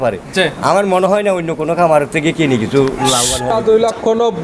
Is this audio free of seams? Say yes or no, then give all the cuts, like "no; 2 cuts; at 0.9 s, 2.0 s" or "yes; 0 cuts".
no; 1 cut; at 3.5 s